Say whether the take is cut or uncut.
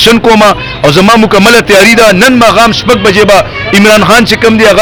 uncut